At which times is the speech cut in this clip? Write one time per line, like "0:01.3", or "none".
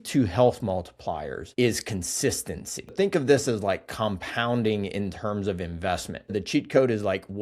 0:01.4
0:02.9
0:06.3